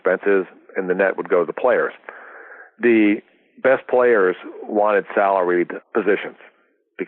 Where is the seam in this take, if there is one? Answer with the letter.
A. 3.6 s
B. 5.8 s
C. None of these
B